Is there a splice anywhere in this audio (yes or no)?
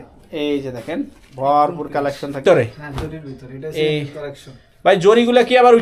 yes